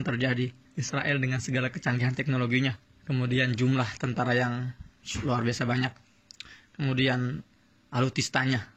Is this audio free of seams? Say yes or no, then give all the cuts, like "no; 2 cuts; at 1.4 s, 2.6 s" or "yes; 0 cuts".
yes; 0 cuts